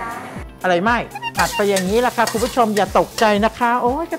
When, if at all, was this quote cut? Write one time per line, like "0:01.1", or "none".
0:01.2